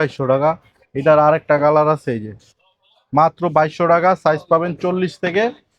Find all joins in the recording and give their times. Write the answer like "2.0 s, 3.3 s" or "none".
none